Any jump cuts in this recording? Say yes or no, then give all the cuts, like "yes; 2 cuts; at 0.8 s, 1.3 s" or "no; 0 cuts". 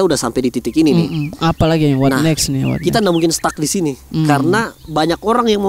no; 0 cuts